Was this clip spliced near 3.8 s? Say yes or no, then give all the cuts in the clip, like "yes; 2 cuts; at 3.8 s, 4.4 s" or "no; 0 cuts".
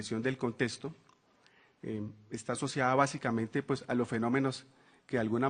yes; 1 cut; at 3.8 s